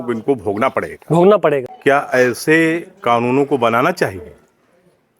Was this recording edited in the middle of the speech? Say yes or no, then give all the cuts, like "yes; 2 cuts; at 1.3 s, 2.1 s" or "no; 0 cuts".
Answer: yes; 1 cut; at 1.7 s